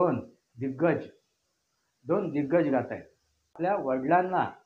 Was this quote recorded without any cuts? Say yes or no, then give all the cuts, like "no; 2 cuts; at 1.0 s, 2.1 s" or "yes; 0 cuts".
no; 1 cut; at 3.5 s